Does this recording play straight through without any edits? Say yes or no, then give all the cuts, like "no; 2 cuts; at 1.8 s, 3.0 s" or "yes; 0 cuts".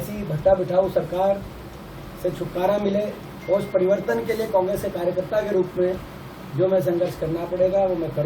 yes; 0 cuts